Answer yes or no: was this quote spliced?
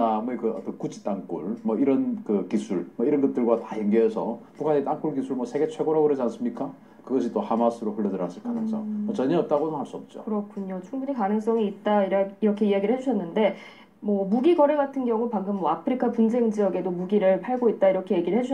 no